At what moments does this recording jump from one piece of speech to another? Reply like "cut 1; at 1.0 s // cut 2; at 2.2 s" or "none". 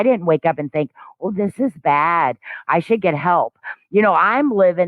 none